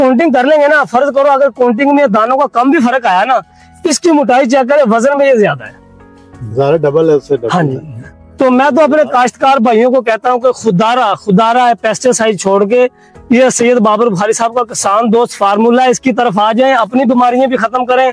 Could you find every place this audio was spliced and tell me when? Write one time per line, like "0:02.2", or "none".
none